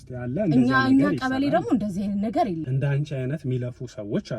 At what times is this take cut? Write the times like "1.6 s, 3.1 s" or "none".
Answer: 2.7 s

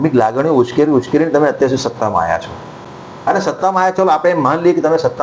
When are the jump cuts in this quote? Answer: none

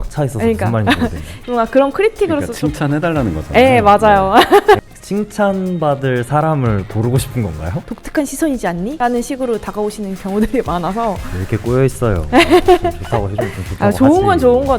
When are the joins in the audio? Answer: 4.8 s, 7.8 s, 8.9 s

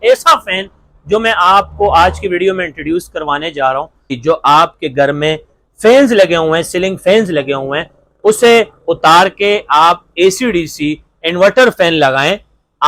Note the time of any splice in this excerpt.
4.2 s

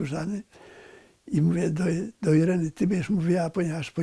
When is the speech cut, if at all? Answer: none

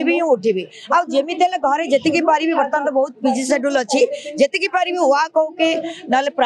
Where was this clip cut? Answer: none

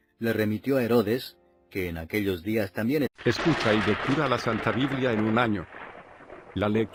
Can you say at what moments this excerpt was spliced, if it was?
none

